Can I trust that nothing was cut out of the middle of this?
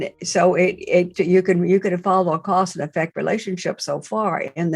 no; 1 cut; at 1.1 s

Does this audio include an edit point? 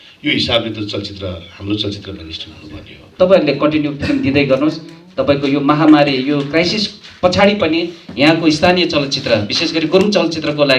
yes; 1 cut; at 3.1 s

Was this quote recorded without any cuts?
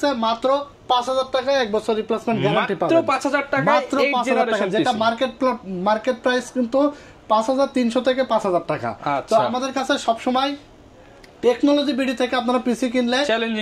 yes; 0 cuts

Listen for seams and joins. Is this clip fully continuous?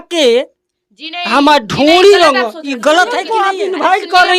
no; 1 cut; at 3.3 s

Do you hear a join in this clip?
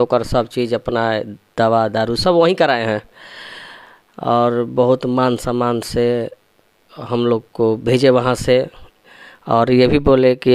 no; 0 cuts

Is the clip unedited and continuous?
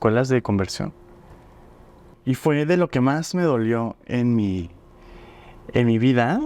no; 1 cut; at 2.1 s

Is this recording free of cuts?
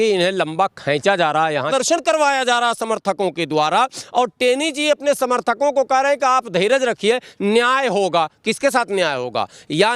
no; 1 cut; at 1.7 s

